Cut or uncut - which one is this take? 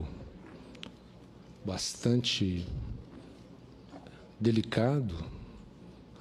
uncut